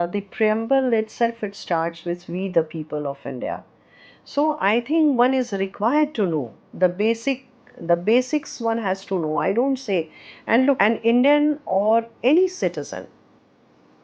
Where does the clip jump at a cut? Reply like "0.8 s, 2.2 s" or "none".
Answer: 10.8 s